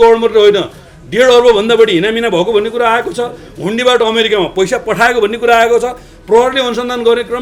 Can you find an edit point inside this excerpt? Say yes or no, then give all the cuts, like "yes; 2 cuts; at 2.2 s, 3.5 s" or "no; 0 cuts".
no; 0 cuts